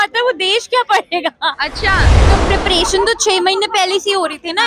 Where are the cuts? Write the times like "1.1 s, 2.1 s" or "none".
2.2 s